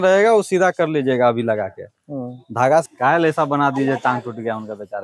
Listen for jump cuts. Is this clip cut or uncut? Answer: cut